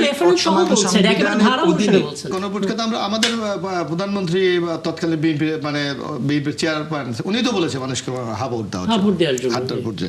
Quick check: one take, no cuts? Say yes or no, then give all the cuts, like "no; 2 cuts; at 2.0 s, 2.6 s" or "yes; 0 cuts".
no; 1 cut; at 2.3 s